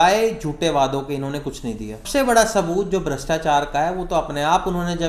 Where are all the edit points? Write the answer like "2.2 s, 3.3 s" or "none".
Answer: 2.1 s